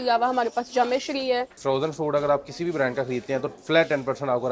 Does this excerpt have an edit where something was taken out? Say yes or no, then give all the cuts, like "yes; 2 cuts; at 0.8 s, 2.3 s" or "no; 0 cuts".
yes; 1 cut; at 1.6 s